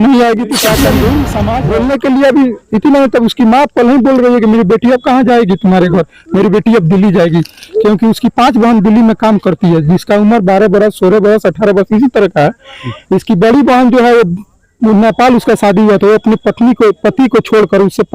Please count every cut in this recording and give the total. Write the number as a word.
one